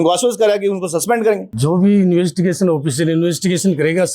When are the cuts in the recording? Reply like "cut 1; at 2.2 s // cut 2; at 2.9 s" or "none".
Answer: cut 1; at 1.5 s